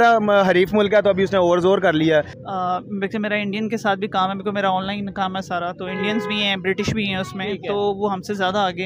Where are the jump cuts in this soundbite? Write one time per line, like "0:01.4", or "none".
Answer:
0:02.4